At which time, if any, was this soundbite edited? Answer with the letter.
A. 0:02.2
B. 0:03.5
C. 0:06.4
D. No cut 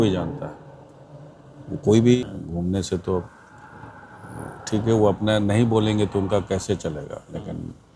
A